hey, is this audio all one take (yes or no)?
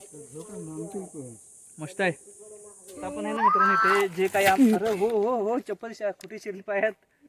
no